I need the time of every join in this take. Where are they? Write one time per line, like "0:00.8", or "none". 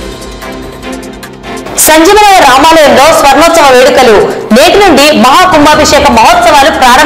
0:01.6